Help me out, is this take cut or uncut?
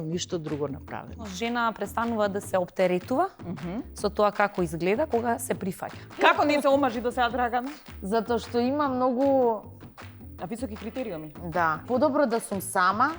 cut